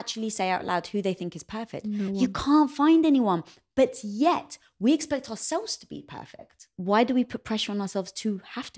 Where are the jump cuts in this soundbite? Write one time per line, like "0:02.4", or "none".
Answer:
0:01.8
0:06.7